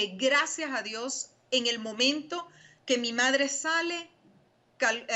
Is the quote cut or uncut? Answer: uncut